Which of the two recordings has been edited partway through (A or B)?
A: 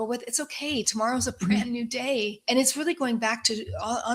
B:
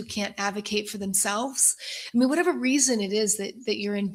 A